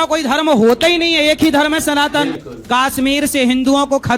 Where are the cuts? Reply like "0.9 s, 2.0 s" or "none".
2.5 s